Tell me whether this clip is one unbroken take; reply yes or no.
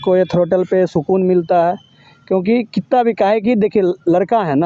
yes